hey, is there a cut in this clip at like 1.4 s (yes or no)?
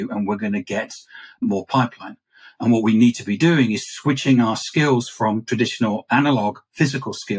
yes